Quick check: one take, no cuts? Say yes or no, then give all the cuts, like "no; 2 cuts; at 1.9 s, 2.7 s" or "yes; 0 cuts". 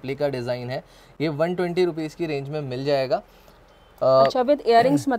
yes; 0 cuts